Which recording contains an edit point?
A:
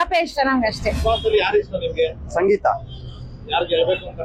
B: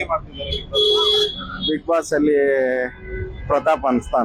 A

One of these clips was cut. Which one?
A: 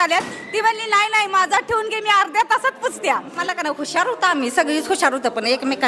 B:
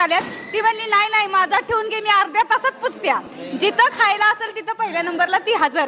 A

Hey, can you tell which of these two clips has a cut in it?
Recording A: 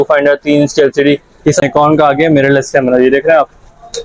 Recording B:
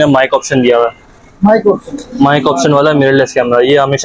A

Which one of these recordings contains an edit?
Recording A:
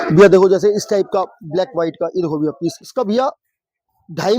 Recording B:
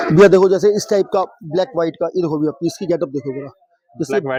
A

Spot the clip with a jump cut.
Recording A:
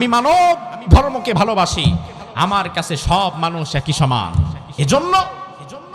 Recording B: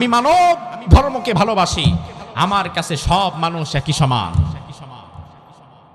A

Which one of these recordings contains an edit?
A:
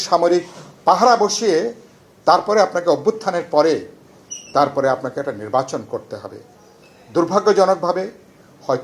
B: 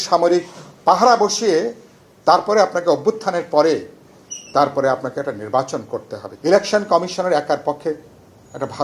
B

